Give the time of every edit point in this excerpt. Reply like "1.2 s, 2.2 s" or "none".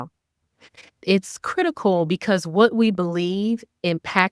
none